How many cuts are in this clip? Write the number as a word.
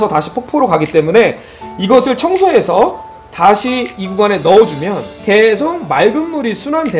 one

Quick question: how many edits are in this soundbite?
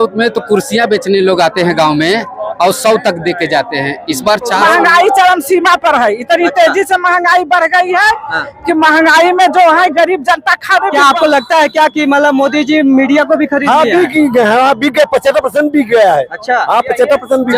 two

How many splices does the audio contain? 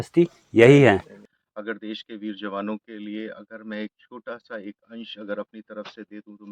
one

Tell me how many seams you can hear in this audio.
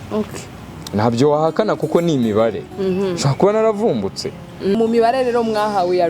one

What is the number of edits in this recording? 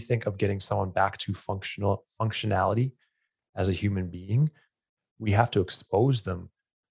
zero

